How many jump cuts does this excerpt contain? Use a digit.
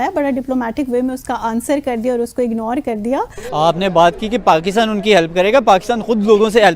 1